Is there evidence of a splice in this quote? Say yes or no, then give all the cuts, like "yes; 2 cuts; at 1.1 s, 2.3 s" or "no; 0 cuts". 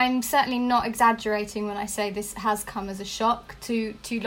no; 0 cuts